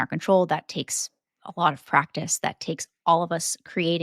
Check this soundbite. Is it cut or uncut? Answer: uncut